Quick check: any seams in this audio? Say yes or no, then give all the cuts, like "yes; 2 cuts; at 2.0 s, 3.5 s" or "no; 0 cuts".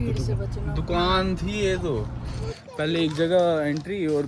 yes; 1 cut; at 2.6 s